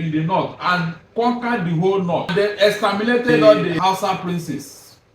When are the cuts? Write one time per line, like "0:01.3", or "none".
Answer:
0:01.0
0:02.3
0:03.8